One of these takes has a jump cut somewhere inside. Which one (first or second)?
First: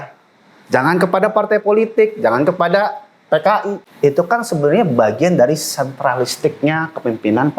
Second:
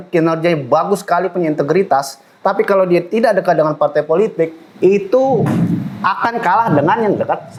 first